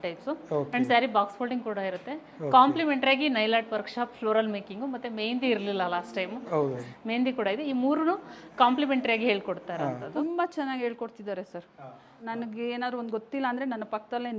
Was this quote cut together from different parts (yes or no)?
yes